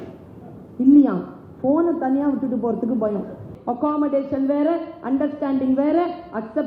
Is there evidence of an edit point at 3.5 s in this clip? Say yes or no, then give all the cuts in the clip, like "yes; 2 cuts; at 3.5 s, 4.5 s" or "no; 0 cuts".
yes; 1 cut; at 3.5 s